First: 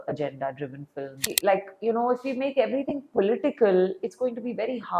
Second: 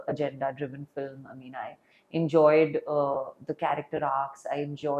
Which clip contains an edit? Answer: first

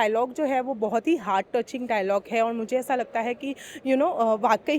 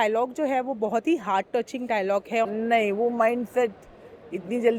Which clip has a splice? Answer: second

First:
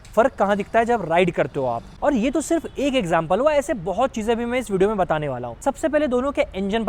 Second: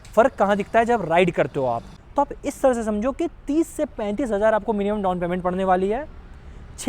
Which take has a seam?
second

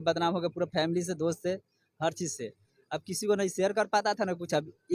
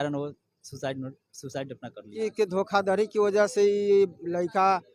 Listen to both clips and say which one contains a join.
second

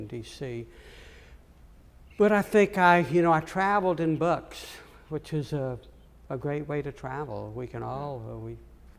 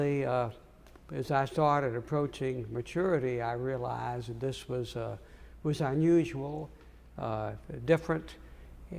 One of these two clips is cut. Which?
second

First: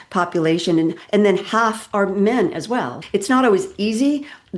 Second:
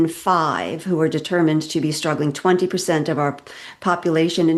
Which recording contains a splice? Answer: first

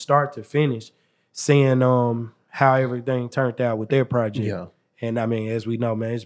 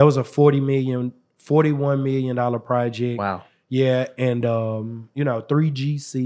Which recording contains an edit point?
second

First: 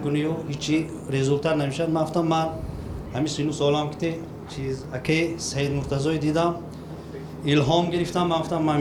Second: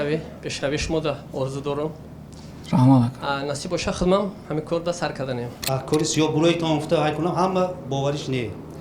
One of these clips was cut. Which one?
second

